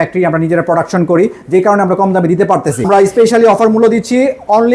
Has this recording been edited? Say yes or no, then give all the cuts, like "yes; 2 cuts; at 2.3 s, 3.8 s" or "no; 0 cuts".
yes; 1 cut; at 2.9 s